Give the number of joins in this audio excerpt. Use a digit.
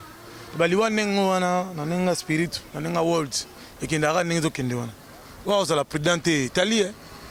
0